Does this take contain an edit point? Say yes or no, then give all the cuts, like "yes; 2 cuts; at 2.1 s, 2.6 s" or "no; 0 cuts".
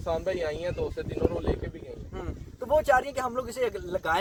no; 0 cuts